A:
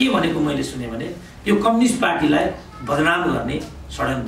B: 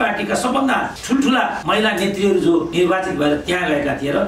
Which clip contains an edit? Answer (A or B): B